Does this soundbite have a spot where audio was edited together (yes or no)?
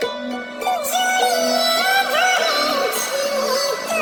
no